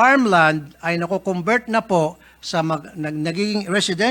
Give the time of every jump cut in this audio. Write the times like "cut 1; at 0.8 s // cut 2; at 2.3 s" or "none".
none